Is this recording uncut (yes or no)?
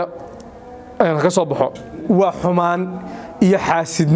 no